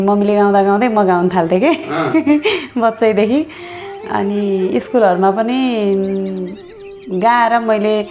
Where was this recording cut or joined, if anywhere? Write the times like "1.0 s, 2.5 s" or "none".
none